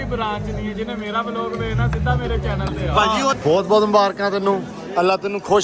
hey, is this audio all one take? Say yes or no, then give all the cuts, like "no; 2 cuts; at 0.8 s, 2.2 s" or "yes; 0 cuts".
no; 1 cut; at 3.3 s